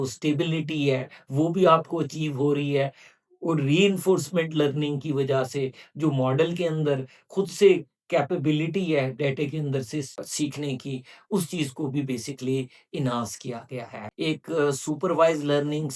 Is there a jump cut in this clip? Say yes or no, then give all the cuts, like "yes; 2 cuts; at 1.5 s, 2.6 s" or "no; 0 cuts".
yes; 1 cut; at 14.0 s